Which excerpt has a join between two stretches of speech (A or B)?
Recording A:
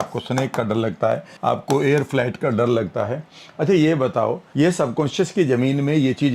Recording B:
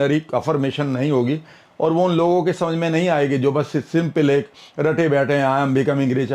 A